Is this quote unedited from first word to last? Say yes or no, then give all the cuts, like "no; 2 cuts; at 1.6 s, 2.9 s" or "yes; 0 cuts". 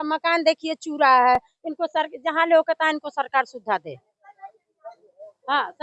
yes; 0 cuts